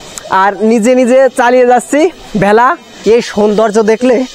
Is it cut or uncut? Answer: cut